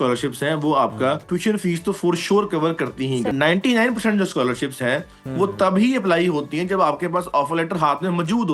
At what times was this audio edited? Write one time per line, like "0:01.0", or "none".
0:01.2
0:03.3